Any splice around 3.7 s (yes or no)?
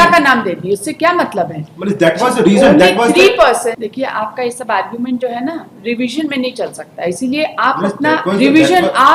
yes